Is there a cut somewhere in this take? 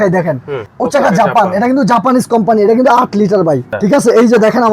yes; 1 cut; at 3.7 s

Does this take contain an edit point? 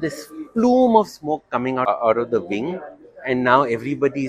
yes; 1 cut; at 1.8 s

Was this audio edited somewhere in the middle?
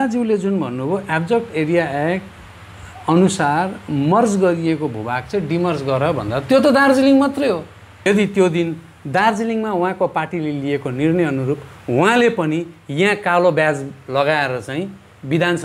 yes; 1 cut; at 8.1 s

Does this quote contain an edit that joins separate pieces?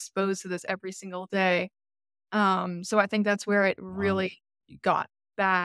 no; 0 cuts

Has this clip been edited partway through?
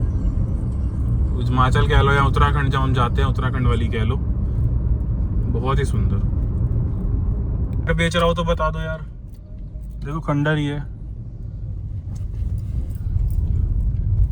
yes; 1 cut; at 7.8 s

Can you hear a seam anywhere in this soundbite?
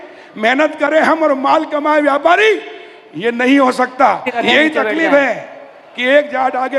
yes; 1 cut; at 4.3 s

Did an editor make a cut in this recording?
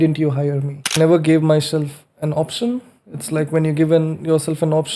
yes; 1 cut; at 1.0 s

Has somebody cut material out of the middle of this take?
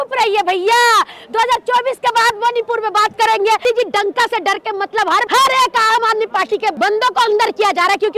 yes; 3 cuts; at 3.6 s, 5.3 s, 6.8 s

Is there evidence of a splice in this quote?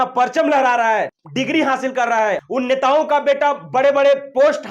yes; 2 cuts; at 1.2 s, 2.4 s

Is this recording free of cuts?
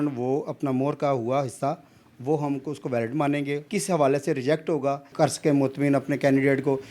no; 2 cuts; at 3.6 s, 5.1 s

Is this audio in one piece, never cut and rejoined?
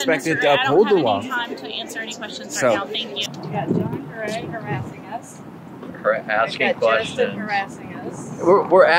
no; 1 cut; at 3.1 s

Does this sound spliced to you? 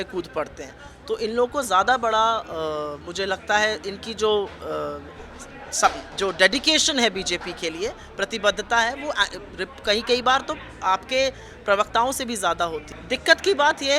yes; 1 cut; at 12.9 s

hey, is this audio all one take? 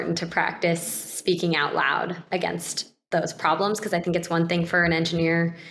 yes; 0 cuts

